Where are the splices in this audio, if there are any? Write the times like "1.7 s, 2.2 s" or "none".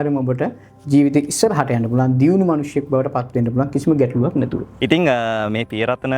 4.6 s